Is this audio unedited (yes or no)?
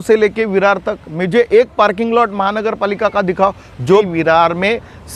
no